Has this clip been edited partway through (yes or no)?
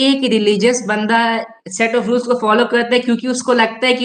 no